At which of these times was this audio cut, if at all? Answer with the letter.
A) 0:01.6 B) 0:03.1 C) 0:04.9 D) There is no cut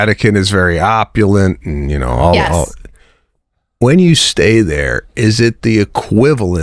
D